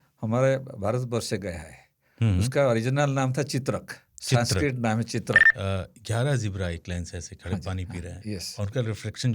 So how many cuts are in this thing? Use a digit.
1